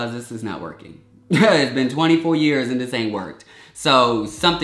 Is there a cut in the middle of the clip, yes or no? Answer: no